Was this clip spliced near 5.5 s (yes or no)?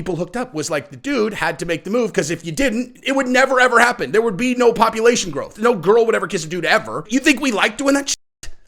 yes